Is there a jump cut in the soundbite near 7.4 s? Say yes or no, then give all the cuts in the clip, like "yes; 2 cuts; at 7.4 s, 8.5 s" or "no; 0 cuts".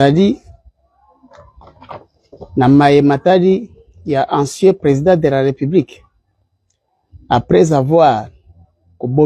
no; 0 cuts